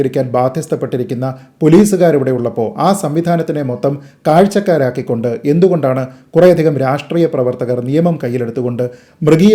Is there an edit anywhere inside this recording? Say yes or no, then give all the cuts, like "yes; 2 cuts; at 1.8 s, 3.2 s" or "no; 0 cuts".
no; 0 cuts